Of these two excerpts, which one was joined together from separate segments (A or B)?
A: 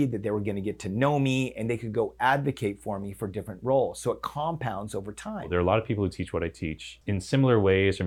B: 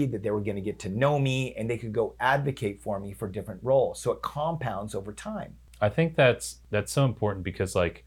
A